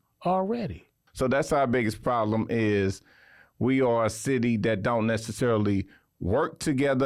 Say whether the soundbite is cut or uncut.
cut